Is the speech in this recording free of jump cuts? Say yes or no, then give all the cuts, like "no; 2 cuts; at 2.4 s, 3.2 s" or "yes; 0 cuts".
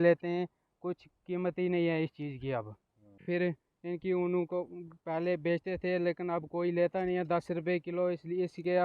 no; 1 cut; at 3.2 s